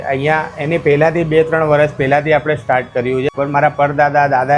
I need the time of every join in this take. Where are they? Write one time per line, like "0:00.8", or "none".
0:03.3